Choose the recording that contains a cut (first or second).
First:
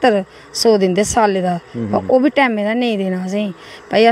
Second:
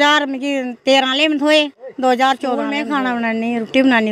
second